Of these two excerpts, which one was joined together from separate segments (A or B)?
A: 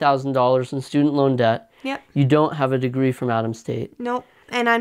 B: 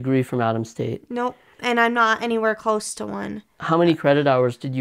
B